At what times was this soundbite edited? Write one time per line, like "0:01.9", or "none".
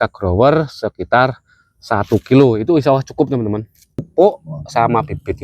0:04.1